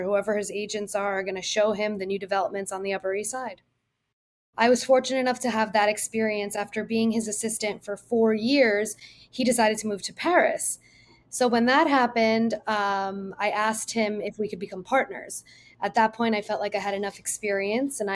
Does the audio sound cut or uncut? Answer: cut